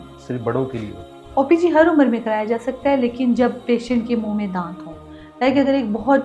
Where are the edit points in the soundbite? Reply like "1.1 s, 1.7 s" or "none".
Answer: none